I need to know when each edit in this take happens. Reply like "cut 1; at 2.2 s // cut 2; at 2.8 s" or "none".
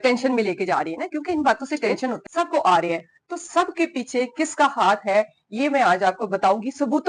cut 1; at 2.1 s